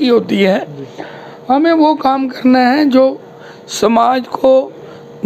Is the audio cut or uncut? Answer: uncut